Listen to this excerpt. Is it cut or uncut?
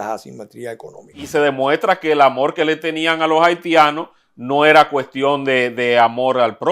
cut